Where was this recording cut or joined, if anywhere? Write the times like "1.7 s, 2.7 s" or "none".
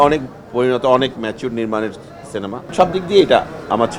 2.7 s